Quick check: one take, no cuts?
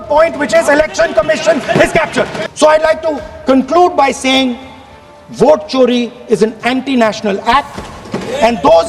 no; 1 cut; at 2.4 s

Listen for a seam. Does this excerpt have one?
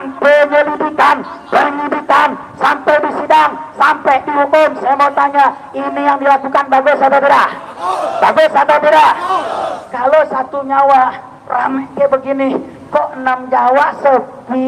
no; 0 cuts

